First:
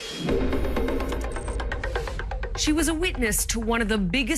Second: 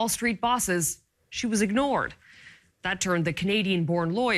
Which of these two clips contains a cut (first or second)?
second